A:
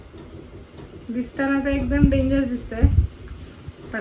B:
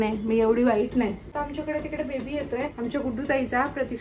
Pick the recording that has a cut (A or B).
B